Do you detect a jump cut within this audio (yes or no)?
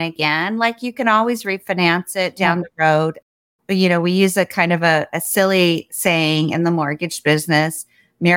no